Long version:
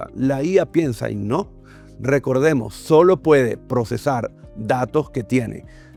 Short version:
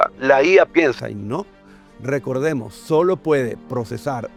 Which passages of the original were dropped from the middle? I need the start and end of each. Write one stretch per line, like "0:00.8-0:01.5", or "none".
none